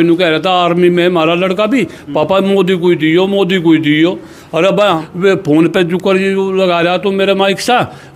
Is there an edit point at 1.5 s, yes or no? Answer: no